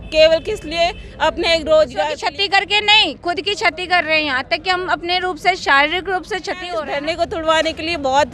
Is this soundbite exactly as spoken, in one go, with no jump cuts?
no; 2 cuts; at 2.2 s, 6.7 s

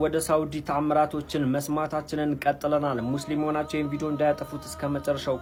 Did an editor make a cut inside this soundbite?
no; 0 cuts

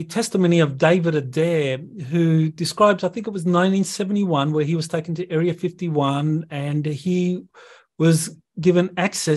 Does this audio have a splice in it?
no; 0 cuts

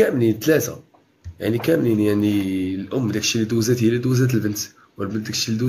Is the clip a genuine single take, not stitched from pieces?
yes; 0 cuts

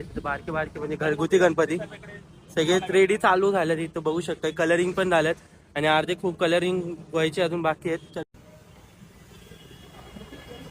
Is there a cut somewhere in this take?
yes; 1 cut; at 8.2 s

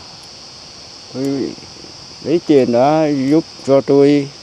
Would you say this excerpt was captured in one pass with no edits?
yes; 0 cuts

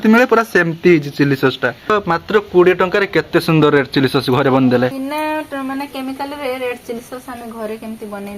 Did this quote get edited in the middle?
yes; 2 cuts; at 1.9 s, 4.9 s

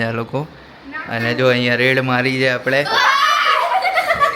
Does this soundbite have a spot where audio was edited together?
no; 0 cuts

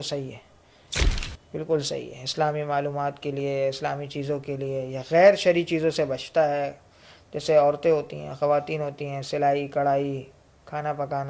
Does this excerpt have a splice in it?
no; 0 cuts

